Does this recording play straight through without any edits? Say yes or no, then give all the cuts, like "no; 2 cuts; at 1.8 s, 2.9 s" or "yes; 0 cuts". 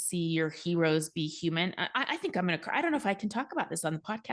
yes; 0 cuts